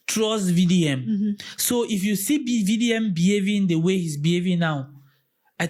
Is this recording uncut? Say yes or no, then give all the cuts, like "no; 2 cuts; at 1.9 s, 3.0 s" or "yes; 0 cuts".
yes; 0 cuts